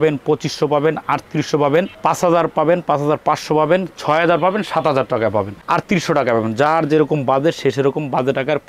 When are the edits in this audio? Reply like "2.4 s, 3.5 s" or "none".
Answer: none